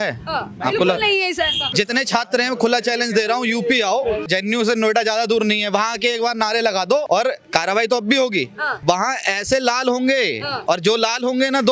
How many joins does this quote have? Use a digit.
5